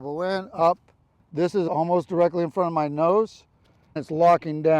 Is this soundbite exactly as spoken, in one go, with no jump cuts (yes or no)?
no